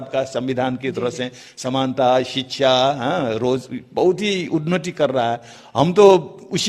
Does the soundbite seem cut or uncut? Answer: uncut